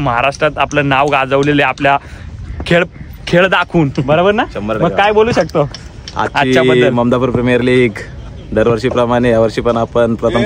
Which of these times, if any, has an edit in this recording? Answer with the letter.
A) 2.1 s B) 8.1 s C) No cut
C